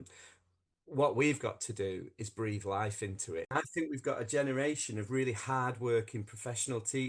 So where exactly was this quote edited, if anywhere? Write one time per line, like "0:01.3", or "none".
0:03.5